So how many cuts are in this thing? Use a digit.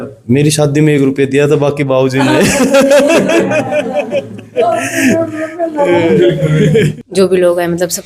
1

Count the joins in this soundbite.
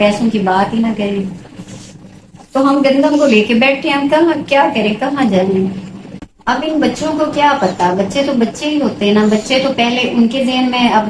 0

